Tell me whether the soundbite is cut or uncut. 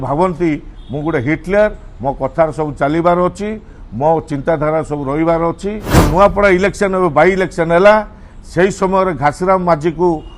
cut